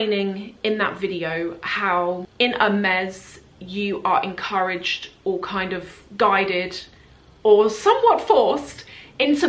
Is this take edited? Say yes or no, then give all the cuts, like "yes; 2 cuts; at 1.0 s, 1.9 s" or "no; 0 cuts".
yes; 1 cut; at 2.3 s